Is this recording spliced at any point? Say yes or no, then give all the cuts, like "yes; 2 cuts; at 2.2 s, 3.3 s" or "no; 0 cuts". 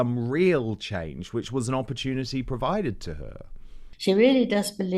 yes; 1 cut; at 3.8 s